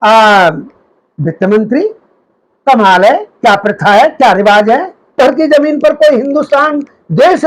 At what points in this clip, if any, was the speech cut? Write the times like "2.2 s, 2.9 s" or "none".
5.2 s